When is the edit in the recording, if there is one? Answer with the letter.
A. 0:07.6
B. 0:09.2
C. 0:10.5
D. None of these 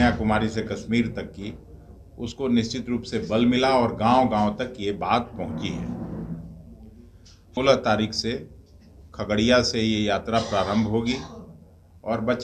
A